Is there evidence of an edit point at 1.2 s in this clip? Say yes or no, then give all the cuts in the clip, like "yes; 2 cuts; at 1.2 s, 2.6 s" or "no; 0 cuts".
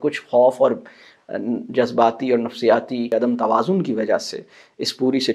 no; 1 cut; at 3.1 s